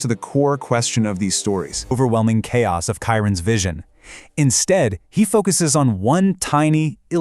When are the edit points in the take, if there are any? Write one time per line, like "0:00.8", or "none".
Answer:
0:01.9